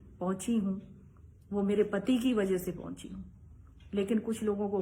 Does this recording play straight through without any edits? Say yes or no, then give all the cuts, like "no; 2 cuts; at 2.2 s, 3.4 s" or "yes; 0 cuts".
yes; 0 cuts